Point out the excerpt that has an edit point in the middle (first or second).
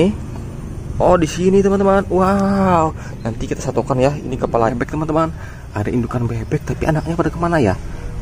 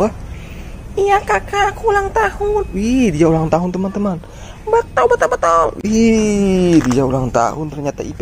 first